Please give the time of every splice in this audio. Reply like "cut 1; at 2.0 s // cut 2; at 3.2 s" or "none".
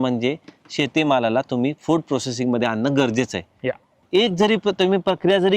cut 1; at 4.0 s